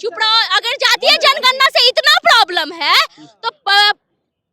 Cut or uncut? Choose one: uncut